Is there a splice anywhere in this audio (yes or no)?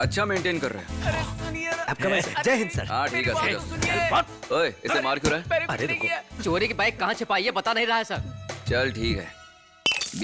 no